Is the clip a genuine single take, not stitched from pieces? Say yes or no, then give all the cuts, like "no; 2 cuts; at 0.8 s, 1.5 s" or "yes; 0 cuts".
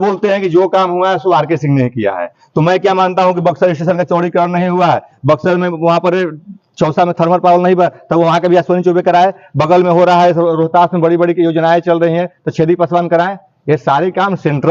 yes; 0 cuts